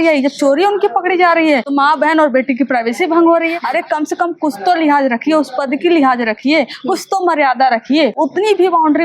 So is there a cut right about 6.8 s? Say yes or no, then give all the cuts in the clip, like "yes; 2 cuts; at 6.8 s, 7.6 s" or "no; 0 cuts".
no; 3 cuts; at 1.7 s, 3.6 s, 8.1 s